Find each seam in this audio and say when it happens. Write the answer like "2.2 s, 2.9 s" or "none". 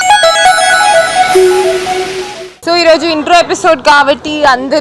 none